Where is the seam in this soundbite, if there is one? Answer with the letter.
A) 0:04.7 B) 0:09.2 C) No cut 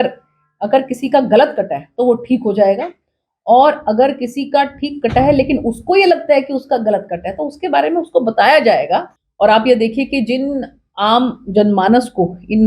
B